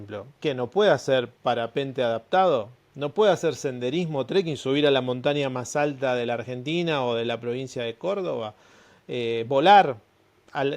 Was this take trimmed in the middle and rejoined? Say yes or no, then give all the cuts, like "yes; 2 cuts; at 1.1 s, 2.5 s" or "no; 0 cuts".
yes; 1 cut; at 1.3 s